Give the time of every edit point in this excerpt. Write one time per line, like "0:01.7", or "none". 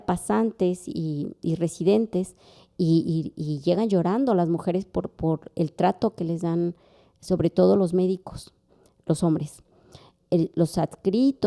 none